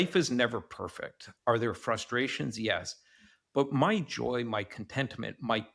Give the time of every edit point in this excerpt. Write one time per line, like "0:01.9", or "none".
0:01.2

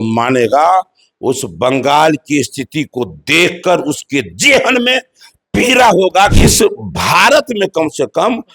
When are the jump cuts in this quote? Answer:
0:06.4

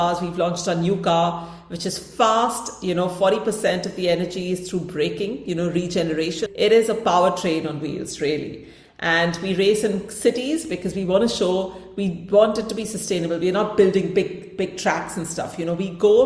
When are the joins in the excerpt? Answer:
0:06.4

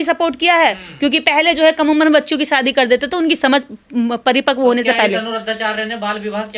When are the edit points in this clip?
none

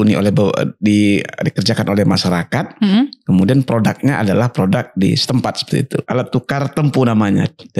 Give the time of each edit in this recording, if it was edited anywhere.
0:06.1

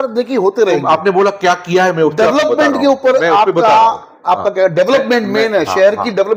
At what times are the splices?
none

